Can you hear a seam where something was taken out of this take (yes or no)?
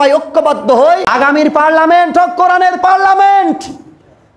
yes